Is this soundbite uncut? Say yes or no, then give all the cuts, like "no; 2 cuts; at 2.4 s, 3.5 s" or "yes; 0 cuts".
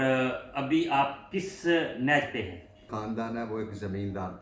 no; 1 cut; at 2.9 s